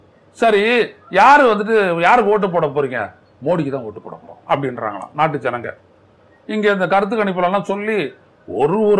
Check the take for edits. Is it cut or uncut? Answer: uncut